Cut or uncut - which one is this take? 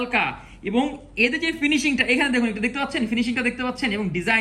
uncut